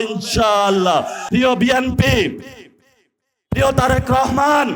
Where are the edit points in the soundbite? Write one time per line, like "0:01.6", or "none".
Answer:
0:01.2